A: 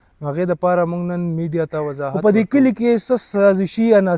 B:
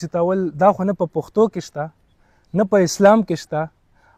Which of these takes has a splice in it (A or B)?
A